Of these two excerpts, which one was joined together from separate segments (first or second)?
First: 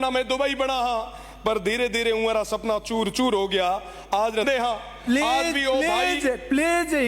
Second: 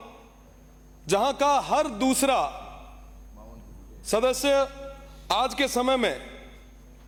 first